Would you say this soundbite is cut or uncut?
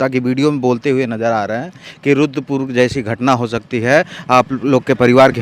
uncut